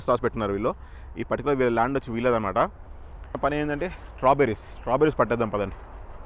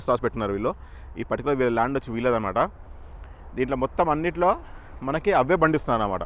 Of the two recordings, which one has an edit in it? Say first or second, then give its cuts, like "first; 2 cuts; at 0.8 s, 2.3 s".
first; 1 cut; at 3.3 s